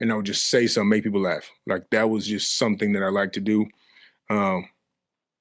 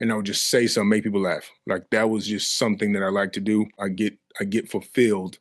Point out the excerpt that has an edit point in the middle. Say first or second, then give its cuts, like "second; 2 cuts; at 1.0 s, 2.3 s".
second; 1 cut; at 3.8 s